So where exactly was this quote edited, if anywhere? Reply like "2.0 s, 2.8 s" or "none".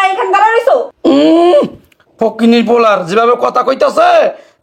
0.9 s